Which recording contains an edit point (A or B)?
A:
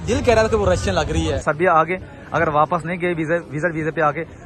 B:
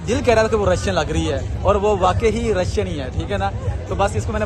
A